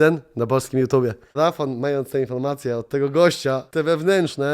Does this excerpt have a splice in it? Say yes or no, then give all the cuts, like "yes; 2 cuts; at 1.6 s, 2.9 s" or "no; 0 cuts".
yes; 2 cuts; at 1.4 s, 3.6 s